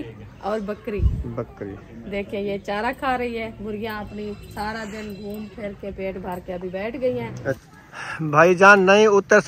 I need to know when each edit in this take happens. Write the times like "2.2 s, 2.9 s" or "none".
7.6 s